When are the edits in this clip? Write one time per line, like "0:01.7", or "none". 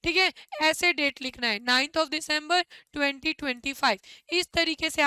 none